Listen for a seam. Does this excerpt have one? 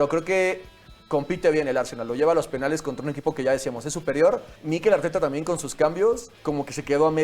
yes; 1 cut; at 4.5 s

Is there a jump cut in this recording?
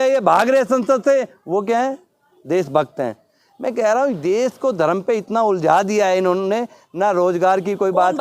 no; 0 cuts

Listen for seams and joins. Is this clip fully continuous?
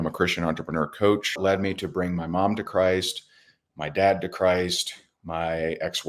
no; 1 cut; at 1.4 s

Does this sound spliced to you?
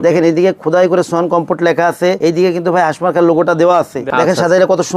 yes; 2 cuts; at 2.2 s, 4.0 s

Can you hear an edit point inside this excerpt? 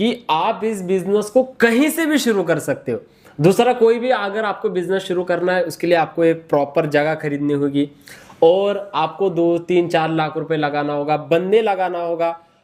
no; 0 cuts

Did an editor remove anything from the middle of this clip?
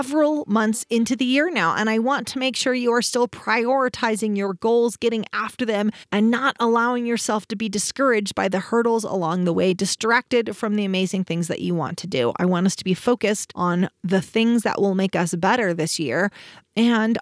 no; 0 cuts

